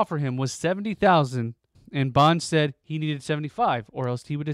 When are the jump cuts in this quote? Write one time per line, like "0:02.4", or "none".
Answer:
none